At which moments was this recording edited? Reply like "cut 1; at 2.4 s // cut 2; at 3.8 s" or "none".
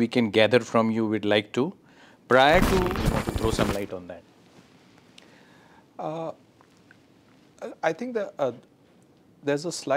cut 1; at 2.9 s